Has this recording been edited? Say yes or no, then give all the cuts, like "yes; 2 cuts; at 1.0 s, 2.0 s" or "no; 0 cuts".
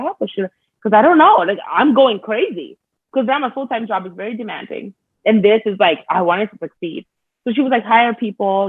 no; 0 cuts